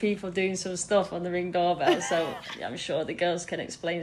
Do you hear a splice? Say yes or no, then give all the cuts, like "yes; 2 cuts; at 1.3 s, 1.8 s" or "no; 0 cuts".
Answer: no; 0 cuts